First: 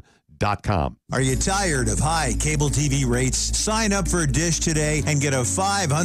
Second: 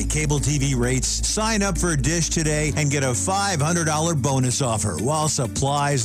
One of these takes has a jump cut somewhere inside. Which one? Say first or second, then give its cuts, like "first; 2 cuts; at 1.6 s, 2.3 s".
first; 1 cut; at 1.0 s